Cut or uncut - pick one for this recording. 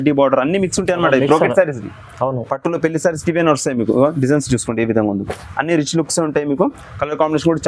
uncut